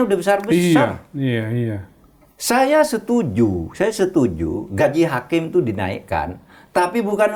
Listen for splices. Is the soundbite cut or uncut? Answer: uncut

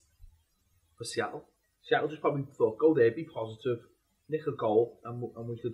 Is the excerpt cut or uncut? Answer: cut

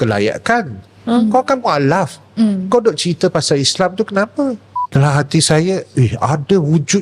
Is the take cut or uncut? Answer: cut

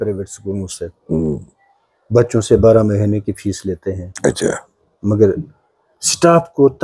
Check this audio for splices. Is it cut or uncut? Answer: uncut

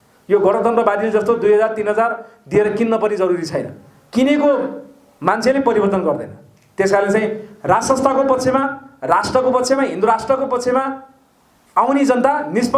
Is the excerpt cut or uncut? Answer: uncut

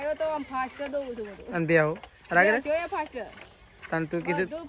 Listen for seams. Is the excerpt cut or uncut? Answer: uncut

